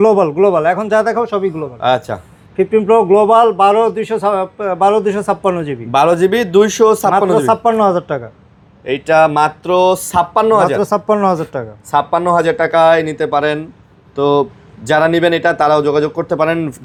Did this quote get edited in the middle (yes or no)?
no